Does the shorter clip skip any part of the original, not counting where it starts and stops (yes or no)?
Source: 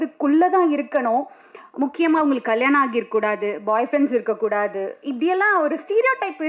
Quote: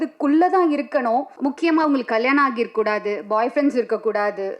yes